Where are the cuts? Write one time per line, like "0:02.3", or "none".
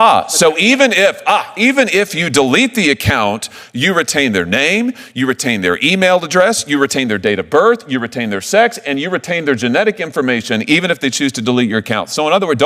none

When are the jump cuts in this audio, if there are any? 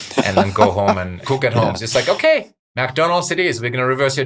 none

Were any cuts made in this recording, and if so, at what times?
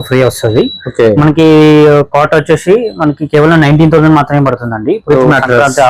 none

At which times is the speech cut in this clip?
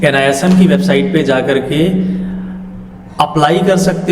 none

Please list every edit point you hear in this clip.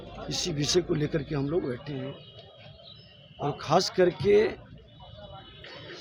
none

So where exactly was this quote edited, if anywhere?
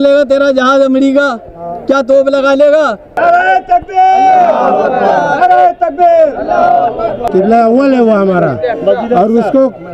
0:03.1
0:07.2

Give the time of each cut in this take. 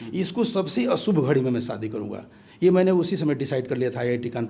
none

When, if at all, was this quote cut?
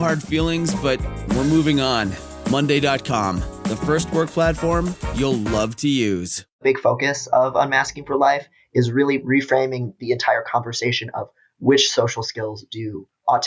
0:06.6

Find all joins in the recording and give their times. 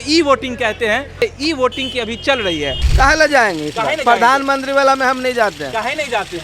0:01.2
0:02.8

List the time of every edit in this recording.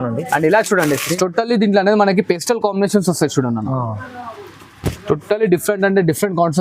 0:01.1

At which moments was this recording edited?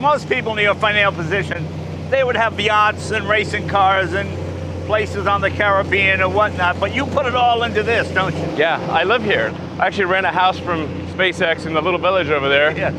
none

